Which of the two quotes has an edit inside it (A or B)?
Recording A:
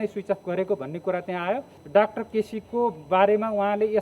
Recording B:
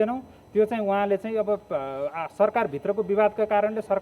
A